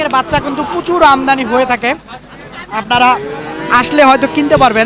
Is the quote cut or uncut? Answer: uncut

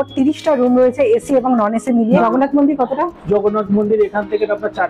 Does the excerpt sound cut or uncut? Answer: cut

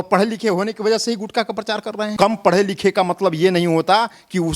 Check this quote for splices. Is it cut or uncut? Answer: cut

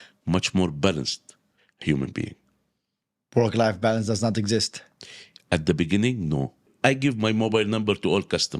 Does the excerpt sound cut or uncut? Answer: cut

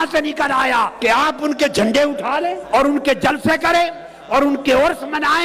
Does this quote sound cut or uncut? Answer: cut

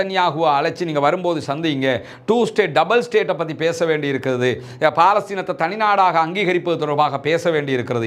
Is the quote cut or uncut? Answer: uncut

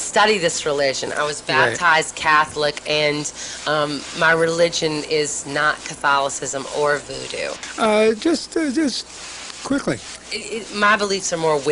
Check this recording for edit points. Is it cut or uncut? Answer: cut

